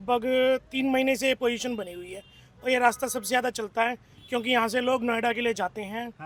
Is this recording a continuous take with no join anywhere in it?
yes; 0 cuts

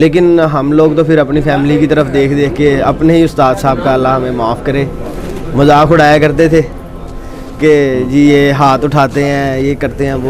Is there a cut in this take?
no; 0 cuts

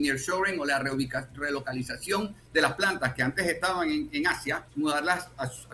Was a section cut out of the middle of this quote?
yes; 1 cut; at 4.6 s

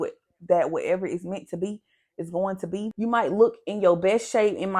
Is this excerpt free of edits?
no; 1 cut; at 2.9 s

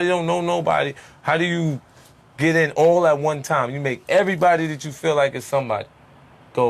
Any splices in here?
no; 0 cuts

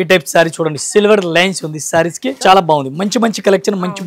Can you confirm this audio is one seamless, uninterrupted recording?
no; 1 cut; at 2.3 s

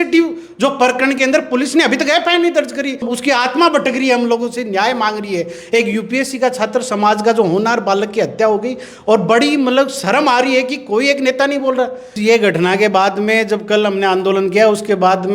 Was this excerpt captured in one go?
no; 2 cuts; at 3.1 s, 12.1 s

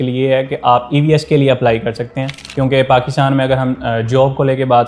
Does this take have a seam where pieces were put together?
yes; 1 cut; at 2.5 s

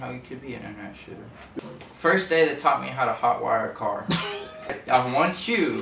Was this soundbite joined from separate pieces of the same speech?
yes; 2 cuts; at 1.6 s, 4.8 s

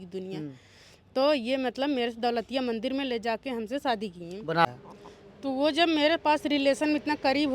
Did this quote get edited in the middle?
yes; 1 cut; at 4.7 s

